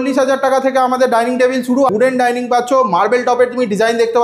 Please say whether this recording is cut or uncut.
cut